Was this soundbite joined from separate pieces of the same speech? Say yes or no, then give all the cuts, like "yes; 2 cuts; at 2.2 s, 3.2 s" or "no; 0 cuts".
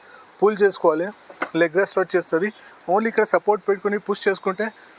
no; 0 cuts